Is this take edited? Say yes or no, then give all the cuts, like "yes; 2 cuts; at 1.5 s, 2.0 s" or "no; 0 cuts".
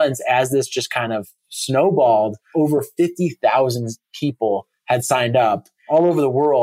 yes; 2 cuts; at 2.4 s, 5.7 s